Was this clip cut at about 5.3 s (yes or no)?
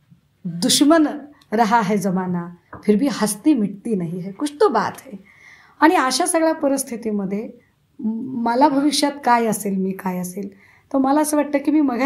no